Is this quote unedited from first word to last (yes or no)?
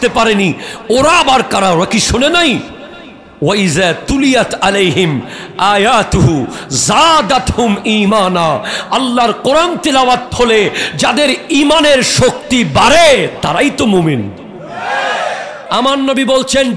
no